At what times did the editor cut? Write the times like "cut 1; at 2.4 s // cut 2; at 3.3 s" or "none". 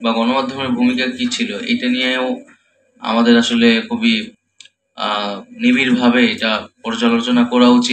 none